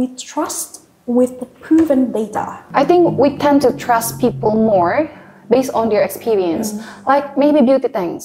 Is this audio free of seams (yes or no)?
no